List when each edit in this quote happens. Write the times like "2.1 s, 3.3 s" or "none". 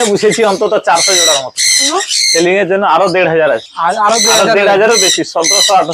1.9 s